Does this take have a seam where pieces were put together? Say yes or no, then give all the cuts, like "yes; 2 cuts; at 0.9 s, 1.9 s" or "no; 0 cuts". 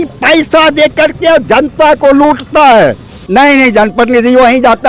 yes; 1 cut; at 3.2 s